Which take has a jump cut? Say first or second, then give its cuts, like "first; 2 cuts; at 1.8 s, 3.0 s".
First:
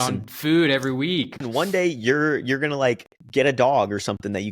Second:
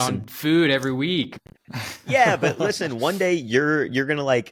first; 2 cuts; at 1.4 s, 3.1 s